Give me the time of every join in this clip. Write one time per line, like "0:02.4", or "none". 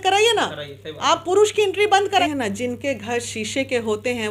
0:02.2